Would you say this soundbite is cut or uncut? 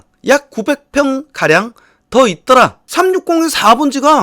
cut